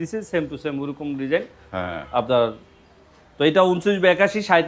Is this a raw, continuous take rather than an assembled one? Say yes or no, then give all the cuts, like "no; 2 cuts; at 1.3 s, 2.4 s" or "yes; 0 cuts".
yes; 0 cuts